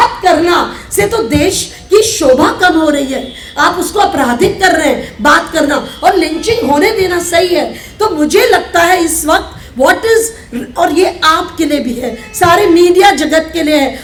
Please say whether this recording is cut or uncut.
uncut